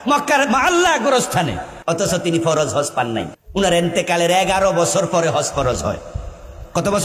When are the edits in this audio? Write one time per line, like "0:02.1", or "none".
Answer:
0:01.7
0:03.4